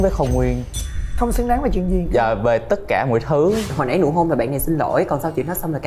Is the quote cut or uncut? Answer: cut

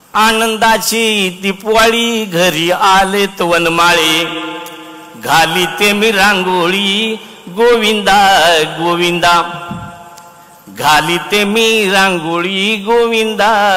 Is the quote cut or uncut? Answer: uncut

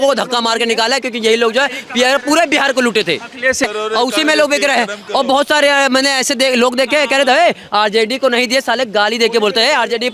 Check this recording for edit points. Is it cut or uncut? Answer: cut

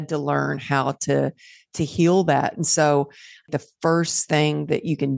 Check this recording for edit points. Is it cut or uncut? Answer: cut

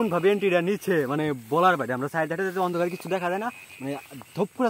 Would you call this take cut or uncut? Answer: uncut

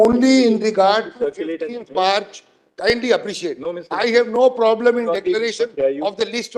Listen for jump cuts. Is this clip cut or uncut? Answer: uncut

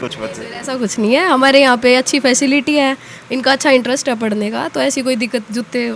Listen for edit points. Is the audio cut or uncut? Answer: uncut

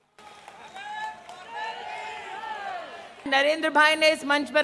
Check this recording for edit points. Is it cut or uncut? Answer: cut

